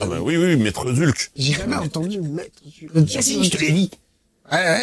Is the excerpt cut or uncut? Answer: uncut